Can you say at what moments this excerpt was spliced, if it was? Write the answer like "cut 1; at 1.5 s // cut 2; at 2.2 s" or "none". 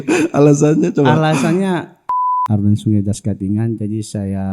cut 1; at 2.2 s